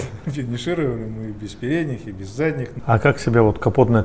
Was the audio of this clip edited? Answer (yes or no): yes